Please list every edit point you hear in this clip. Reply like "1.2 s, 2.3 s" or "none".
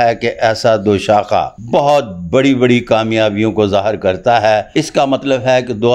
1.6 s, 4.7 s